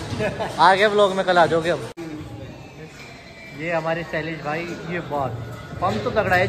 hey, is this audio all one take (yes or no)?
no